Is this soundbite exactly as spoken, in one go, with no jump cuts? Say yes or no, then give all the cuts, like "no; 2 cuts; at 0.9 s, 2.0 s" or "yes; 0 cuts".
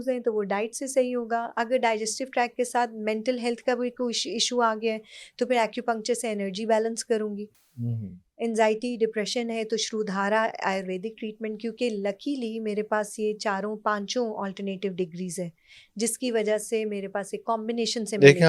yes; 0 cuts